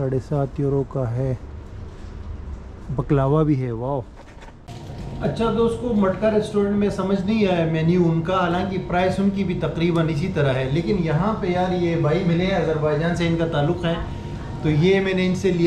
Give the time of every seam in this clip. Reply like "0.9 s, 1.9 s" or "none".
none